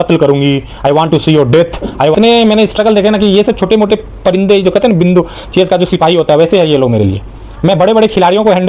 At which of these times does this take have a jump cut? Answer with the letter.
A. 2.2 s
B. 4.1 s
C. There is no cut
A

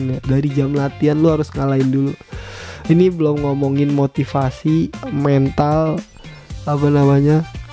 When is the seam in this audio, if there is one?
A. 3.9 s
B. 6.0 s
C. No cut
C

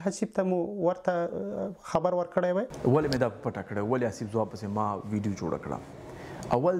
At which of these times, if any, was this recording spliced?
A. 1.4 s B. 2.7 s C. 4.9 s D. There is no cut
B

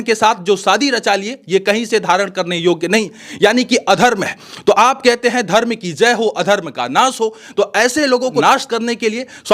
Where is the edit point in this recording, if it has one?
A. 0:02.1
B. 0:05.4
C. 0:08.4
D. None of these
C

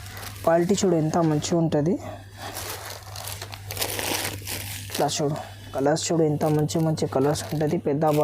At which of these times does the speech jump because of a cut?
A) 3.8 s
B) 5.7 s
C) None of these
B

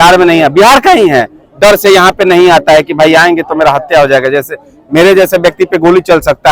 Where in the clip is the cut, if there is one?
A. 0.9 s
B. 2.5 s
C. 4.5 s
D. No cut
D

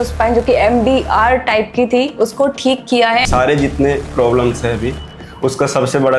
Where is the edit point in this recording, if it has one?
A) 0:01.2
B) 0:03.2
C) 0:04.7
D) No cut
B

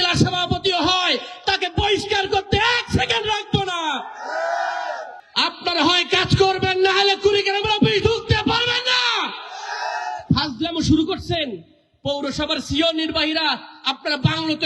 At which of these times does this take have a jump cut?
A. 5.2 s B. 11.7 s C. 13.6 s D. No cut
A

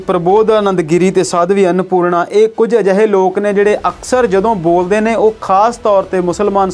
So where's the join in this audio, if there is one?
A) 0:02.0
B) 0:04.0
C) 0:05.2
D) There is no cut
D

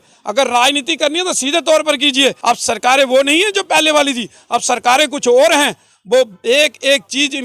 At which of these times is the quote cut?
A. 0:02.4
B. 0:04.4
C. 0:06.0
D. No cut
A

